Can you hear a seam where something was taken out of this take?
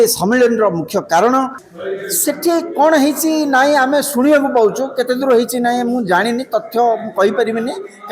yes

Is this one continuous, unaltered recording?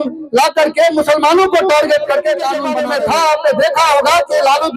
no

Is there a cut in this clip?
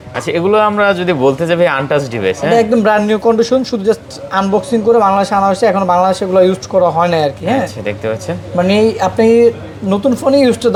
no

